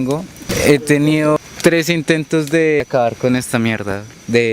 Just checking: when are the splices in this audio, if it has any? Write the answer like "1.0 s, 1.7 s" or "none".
1.4 s, 2.8 s

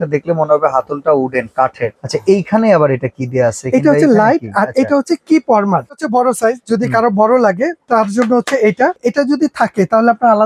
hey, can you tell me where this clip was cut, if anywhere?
5.9 s, 9.0 s

